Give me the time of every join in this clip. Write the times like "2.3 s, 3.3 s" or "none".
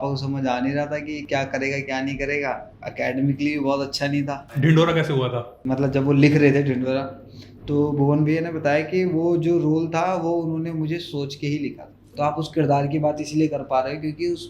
2.8 s, 4.4 s, 5.6 s, 12.0 s